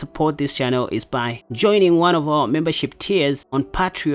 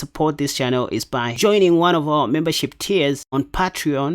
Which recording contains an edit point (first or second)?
second